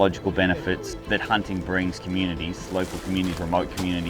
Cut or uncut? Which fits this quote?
cut